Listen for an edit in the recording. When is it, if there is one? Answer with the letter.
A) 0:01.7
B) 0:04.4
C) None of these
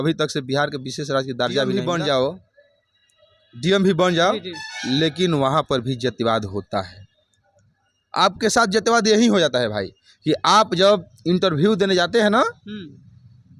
A